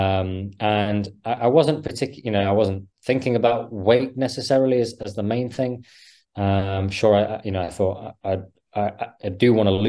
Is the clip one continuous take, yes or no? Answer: yes